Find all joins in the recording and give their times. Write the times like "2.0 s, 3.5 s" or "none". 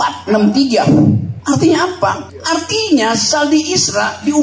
1.3 s, 2.3 s

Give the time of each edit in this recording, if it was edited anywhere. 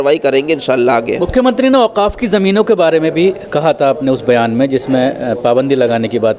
none

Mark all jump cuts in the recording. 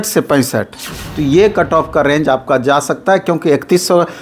1.0 s

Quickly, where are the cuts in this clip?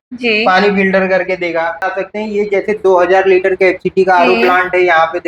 2.0 s

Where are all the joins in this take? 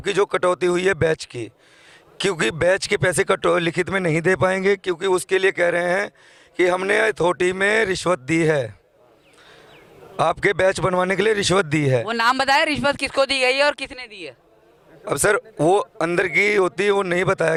none

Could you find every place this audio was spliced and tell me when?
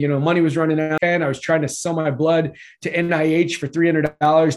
1.0 s

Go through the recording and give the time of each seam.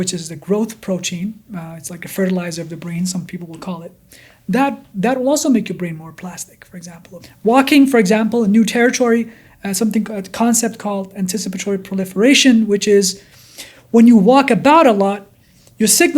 7.2 s

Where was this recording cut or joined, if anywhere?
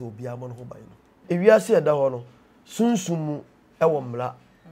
1.2 s

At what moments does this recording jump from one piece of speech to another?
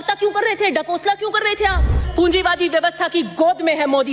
2.1 s

